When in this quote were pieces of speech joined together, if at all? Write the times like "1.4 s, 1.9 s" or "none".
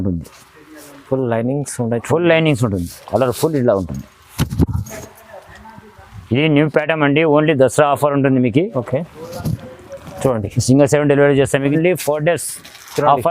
11.7 s